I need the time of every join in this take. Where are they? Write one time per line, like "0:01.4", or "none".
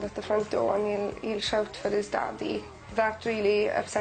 none